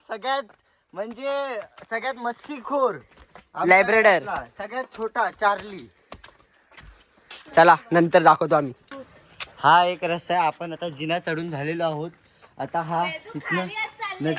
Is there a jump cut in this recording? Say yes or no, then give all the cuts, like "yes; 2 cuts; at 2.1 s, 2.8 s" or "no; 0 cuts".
no; 0 cuts